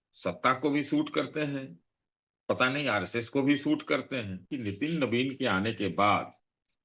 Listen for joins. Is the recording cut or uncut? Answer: cut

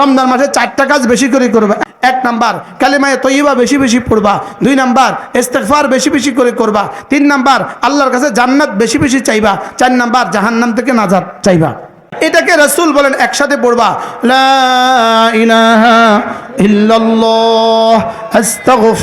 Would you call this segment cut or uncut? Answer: cut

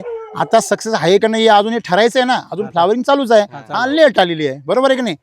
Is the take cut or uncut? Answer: uncut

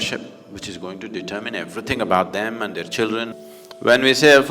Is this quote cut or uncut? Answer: cut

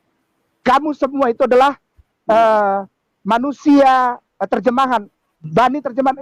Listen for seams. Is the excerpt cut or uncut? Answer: uncut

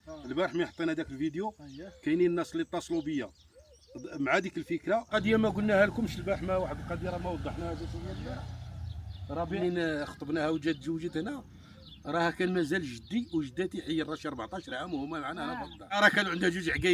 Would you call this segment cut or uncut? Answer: cut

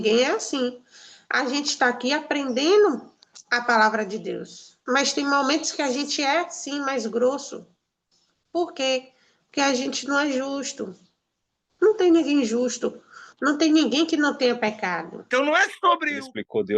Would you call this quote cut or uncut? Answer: cut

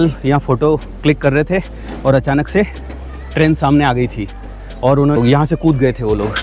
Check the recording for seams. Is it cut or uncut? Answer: cut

